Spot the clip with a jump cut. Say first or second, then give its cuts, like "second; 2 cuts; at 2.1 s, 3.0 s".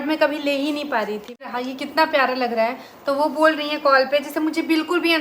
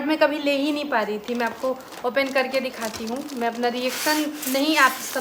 first; 1 cut; at 1.5 s